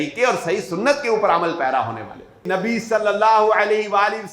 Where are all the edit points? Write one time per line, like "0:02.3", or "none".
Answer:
0:02.4